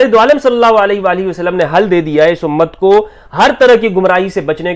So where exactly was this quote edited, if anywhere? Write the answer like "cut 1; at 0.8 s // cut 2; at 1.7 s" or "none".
none